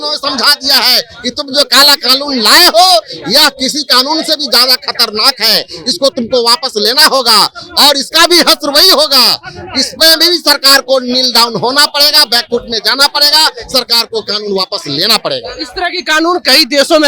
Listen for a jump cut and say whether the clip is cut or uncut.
uncut